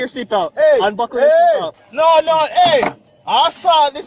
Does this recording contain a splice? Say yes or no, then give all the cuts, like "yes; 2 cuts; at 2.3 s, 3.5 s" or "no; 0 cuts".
yes; 1 cut; at 1.8 s